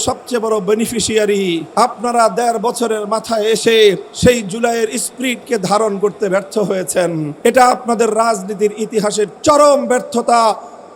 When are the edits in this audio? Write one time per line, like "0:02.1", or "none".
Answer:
0:01.7
0:04.1
0:07.3